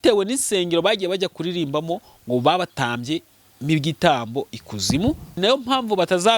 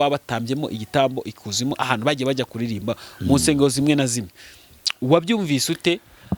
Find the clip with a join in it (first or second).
first